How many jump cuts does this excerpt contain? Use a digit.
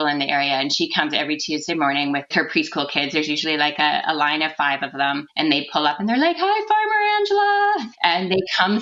2